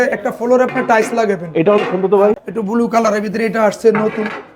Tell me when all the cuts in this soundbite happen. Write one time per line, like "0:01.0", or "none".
0:02.4